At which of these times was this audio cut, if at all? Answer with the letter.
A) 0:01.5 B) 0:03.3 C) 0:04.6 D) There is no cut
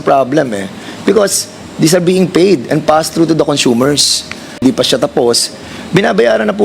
C